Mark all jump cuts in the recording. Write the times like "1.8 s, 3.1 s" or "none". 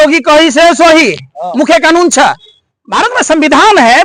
none